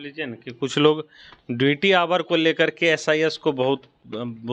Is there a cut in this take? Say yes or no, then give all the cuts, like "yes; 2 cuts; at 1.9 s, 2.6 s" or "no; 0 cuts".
no; 0 cuts